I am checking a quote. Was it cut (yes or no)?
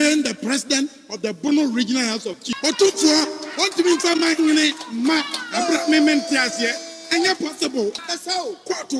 yes